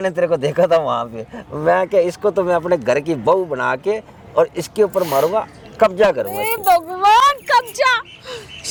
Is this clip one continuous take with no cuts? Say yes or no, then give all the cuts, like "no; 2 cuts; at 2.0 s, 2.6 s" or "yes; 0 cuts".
yes; 0 cuts